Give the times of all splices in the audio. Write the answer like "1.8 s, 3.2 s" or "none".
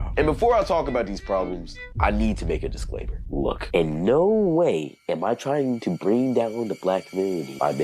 6.8 s

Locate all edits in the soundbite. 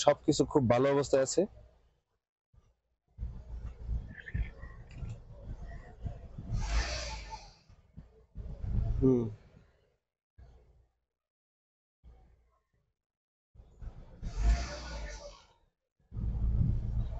none

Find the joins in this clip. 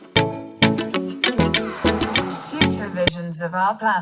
2.9 s

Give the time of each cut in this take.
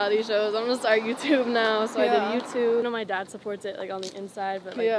2.8 s

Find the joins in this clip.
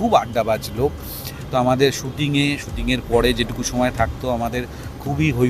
none

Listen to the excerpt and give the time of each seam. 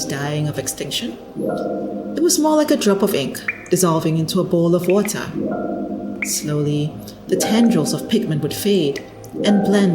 1.2 s, 2.2 s, 5.3 s, 6.5 s

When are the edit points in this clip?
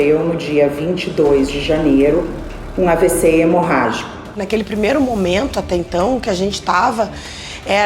4.4 s

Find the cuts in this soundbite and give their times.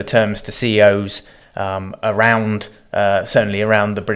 none

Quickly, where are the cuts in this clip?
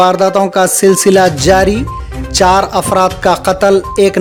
none

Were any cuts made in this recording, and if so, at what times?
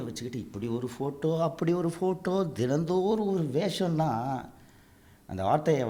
none

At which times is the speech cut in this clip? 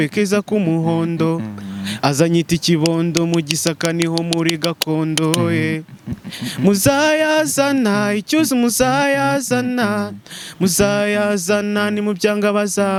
none

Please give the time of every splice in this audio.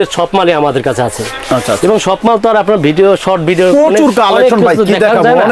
none

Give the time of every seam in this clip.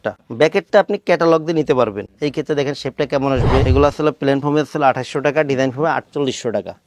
2.1 s, 3.6 s

